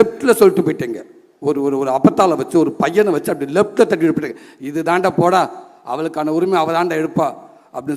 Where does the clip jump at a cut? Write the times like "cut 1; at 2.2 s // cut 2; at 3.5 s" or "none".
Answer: none